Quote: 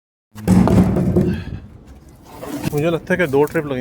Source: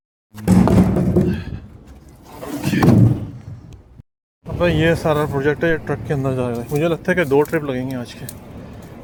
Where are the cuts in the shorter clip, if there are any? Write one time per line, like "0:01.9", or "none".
0:02.6